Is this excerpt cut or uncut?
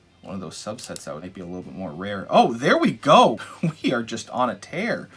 cut